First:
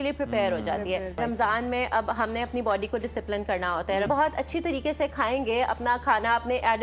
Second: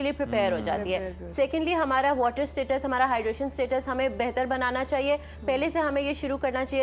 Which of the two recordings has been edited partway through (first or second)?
first